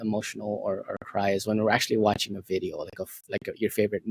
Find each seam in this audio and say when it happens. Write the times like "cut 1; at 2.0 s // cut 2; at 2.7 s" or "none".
none